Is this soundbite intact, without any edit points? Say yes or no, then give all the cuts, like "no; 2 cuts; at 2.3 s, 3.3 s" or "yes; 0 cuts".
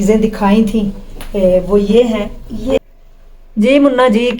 no; 1 cut; at 2.8 s